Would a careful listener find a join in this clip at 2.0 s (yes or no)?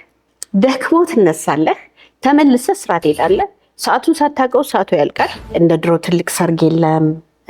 no